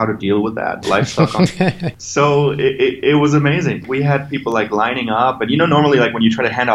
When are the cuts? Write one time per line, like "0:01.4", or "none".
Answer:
0:01.9
0:03.8